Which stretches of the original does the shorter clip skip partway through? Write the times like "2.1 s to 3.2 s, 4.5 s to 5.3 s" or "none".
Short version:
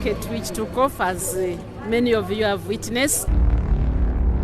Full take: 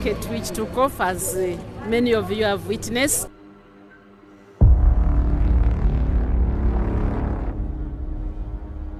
3.3 s to 5.4 s